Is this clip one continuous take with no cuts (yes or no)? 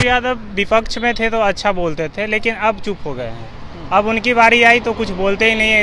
yes